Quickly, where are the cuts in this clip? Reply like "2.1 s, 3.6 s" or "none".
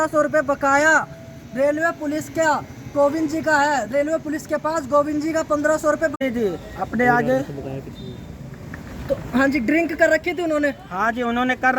6.1 s